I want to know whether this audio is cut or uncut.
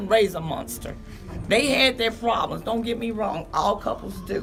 uncut